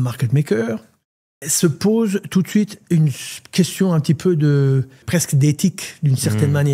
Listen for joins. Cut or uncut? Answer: cut